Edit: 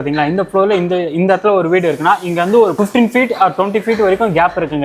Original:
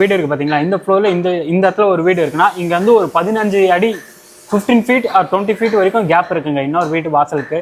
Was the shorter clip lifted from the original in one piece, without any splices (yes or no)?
no